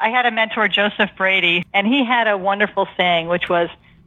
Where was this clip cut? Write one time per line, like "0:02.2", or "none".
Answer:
0:01.6